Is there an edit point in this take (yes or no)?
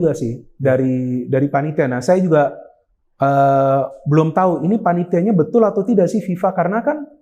no